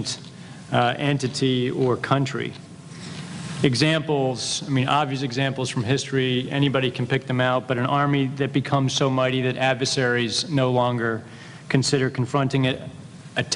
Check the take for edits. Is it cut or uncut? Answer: uncut